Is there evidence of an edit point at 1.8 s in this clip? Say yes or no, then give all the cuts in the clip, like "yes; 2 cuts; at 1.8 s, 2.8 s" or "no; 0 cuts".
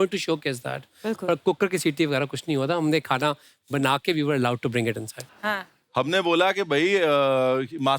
no; 1 cut; at 5.2 s